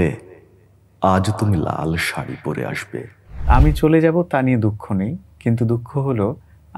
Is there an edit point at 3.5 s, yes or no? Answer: yes